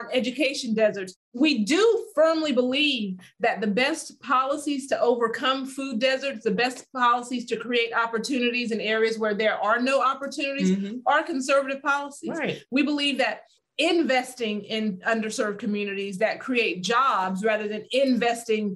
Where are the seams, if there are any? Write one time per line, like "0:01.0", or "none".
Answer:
none